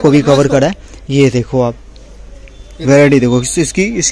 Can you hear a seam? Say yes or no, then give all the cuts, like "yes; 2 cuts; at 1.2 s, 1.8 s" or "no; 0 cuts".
no; 0 cuts